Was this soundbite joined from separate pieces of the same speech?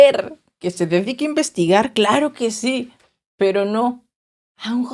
no; 0 cuts

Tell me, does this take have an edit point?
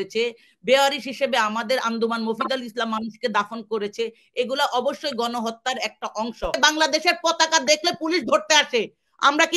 yes; 1 cut; at 6.6 s

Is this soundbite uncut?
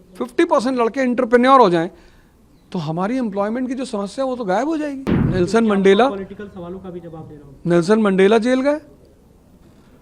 no; 1 cut; at 5.1 s

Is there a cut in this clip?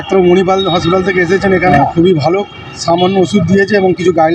yes; 1 cut; at 1.7 s

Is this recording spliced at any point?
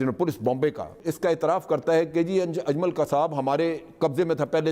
yes; 1 cut; at 0.9 s

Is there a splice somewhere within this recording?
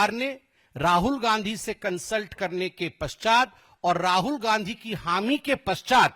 no; 0 cuts

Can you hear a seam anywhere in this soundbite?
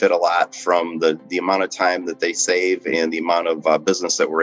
no; 0 cuts

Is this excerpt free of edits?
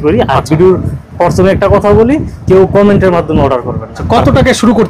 no; 1 cut; at 3.9 s

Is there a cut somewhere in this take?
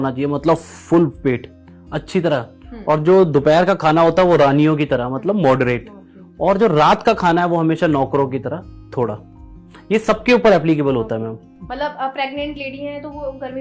no; 0 cuts

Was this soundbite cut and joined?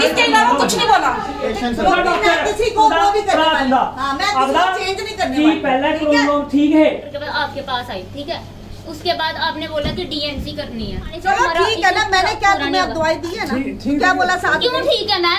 yes; 3 cuts; at 1.5 s, 7.1 s, 11.1 s

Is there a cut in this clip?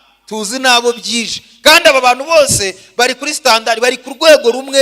no; 0 cuts

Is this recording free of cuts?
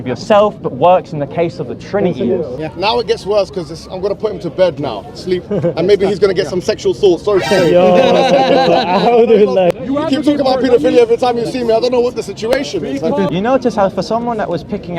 no; 3 cuts; at 2.6 s, 9.7 s, 13.3 s

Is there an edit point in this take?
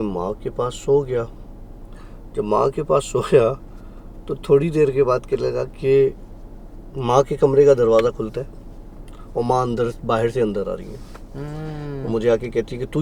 no; 0 cuts

